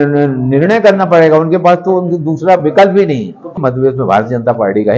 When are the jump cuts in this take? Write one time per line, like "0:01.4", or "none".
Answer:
0:03.6